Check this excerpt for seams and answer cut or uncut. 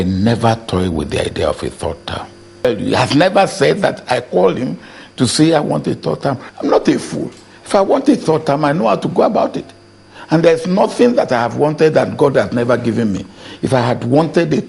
cut